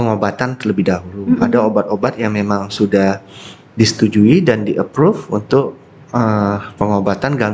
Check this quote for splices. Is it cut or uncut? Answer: uncut